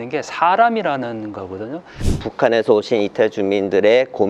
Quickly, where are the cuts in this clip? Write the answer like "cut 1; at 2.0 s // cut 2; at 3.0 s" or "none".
cut 1; at 2.2 s